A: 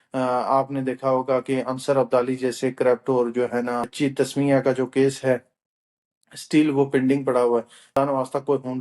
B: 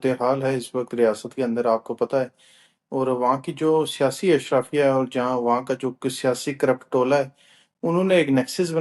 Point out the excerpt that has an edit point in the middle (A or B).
A